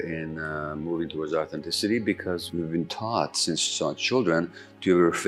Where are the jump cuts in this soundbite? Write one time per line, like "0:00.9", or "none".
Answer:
0:02.4